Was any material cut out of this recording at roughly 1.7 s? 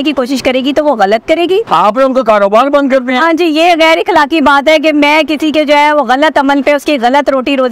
yes; 1 cut; at 1.7 s

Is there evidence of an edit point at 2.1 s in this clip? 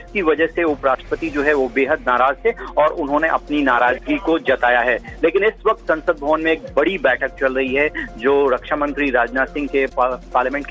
yes; 1 cut; at 2.1 s

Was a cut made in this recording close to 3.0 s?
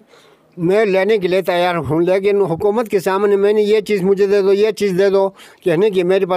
no; 0 cuts

